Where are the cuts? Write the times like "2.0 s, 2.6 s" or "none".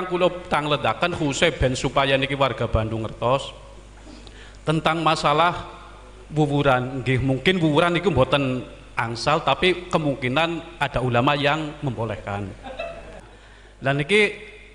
13.1 s